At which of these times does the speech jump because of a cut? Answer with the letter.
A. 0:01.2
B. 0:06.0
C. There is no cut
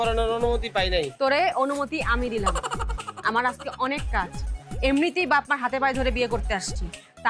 C